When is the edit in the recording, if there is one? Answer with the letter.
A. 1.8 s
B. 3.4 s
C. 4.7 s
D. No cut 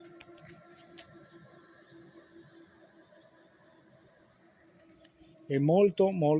D